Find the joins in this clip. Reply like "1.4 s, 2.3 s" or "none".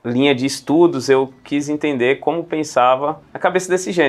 none